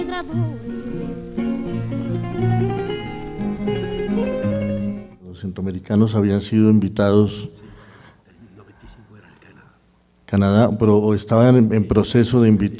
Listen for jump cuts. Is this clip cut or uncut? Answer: uncut